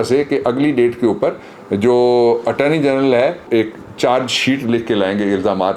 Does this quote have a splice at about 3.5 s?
yes; 1 cut; at 3.5 s

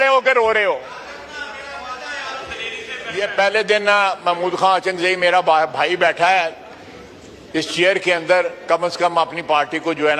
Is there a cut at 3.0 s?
yes; 1 cut; at 3.0 s

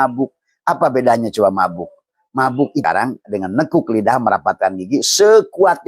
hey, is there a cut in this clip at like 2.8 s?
yes; 1 cut; at 2.8 s

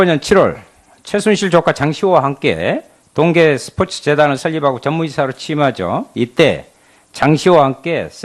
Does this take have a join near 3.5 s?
yes; 1 cut; at 3.5 s

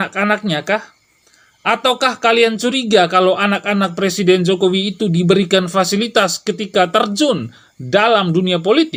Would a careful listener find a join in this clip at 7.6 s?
no; 0 cuts

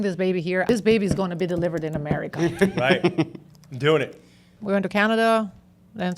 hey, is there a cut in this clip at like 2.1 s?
no; 2 cuts; at 0.7 s, 4.5 s

